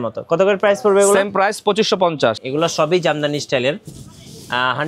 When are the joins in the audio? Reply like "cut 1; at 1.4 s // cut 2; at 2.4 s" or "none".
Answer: cut 1; at 2.4 s